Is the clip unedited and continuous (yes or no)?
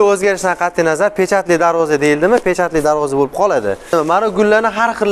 no